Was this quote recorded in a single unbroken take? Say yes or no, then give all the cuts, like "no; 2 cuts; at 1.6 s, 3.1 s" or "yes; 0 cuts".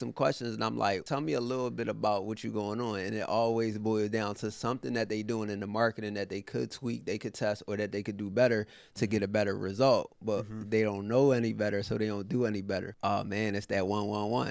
no; 2 cuts; at 1.0 s, 12.9 s